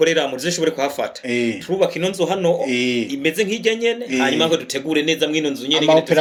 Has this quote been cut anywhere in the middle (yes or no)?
no